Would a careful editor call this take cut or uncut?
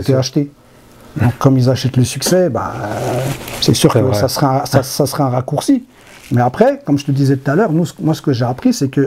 uncut